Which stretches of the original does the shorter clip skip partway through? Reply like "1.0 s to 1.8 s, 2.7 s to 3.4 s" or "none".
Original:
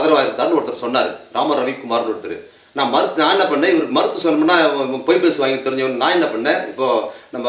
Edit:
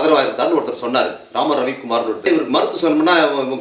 2.2 s to 3.7 s